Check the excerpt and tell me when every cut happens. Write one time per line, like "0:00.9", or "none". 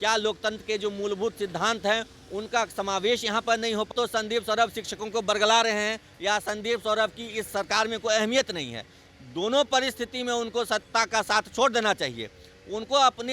0:03.9